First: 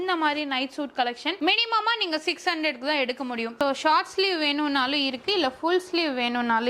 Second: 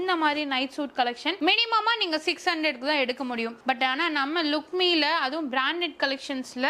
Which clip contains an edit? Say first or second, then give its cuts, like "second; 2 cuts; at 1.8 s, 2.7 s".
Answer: first; 1 cut; at 3.6 s